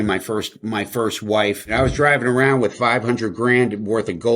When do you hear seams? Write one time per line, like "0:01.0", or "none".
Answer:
0:01.7